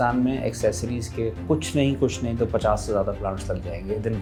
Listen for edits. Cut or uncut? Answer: uncut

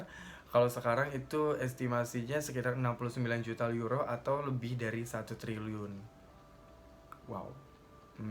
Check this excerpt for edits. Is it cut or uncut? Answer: uncut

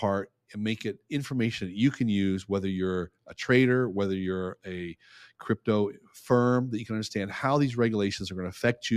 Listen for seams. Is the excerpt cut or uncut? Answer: uncut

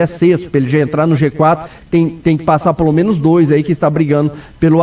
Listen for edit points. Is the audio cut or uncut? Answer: uncut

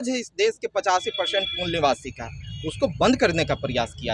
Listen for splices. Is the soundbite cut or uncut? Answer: uncut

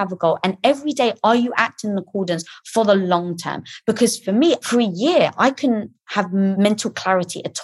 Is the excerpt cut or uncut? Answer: cut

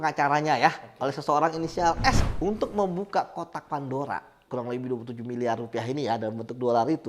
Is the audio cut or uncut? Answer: cut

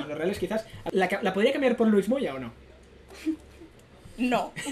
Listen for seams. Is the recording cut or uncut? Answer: uncut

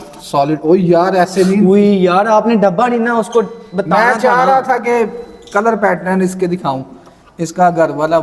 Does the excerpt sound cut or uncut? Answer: uncut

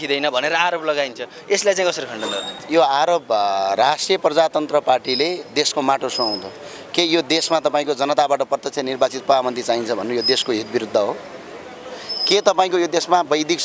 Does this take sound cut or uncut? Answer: uncut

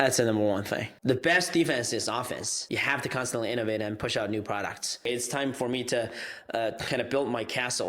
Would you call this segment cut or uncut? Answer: cut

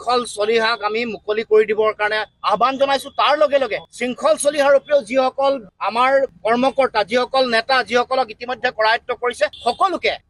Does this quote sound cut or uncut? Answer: uncut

